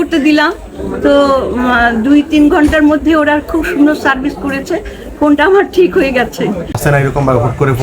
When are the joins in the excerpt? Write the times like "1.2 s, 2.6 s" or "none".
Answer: 6.7 s